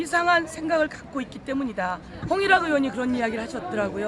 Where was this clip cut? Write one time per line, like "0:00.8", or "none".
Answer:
0:02.1